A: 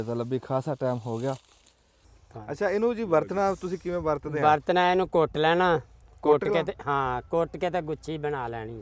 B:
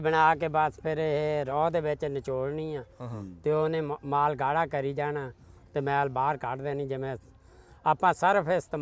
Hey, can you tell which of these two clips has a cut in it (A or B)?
A